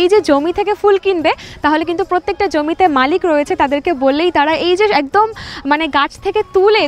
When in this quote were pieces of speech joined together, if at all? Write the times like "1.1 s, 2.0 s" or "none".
none